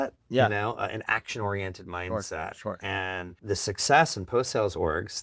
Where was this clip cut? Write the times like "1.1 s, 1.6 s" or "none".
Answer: 3.3 s